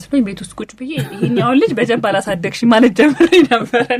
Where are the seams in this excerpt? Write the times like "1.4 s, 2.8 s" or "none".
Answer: none